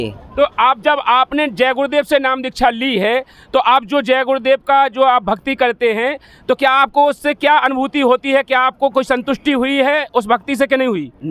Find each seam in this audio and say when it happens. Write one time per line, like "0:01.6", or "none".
none